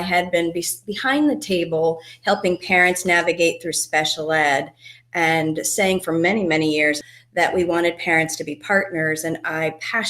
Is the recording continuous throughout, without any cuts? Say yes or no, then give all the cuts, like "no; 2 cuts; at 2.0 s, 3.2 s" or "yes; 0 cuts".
no; 1 cut; at 7.1 s